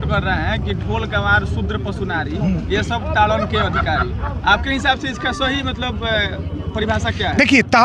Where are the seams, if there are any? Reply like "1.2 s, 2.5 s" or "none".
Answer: none